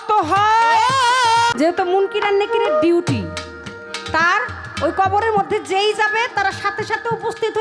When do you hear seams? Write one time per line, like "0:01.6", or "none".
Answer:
0:01.5